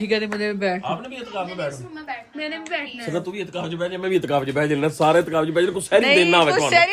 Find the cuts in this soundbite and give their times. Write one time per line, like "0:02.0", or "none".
none